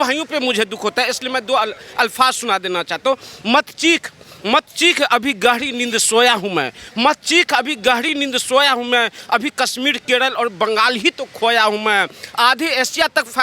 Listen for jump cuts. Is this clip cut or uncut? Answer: uncut